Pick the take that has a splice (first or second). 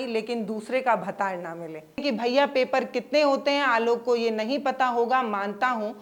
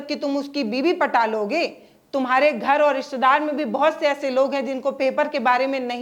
first